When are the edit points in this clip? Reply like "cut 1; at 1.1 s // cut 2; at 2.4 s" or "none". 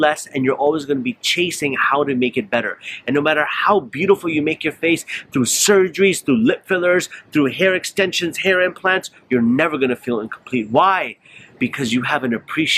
none